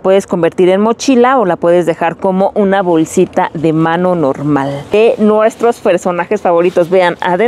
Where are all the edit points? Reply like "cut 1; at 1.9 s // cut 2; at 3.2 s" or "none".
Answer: cut 1; at 4.9 s